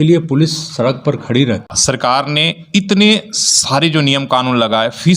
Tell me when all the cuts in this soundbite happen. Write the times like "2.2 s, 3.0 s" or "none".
1.7 s